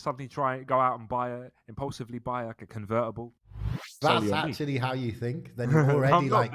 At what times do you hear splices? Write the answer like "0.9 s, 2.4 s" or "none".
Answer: 3.9 s